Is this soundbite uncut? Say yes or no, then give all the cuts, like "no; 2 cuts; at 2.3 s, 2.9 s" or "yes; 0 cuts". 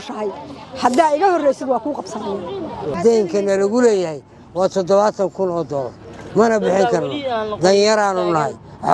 no; 1 cut; at 3.0 s